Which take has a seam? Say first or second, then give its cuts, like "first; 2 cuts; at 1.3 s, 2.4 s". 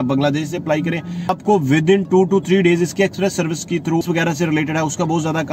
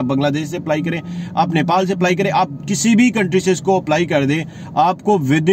first; 2 cuts; at 1.3 s, 4.0 s